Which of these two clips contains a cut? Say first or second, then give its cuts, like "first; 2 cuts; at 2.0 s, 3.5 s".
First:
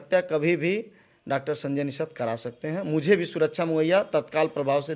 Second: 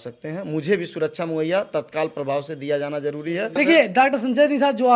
second; 1 cut; at 3.5 s